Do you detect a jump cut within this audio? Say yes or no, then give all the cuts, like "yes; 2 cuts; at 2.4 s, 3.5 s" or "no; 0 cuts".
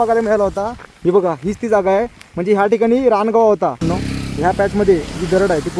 yes; 1 cut; at 3.9 s